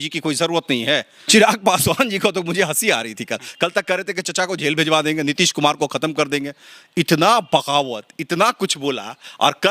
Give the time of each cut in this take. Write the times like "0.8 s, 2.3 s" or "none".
1.1 s